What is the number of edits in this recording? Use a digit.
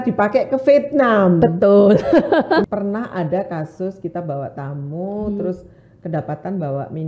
1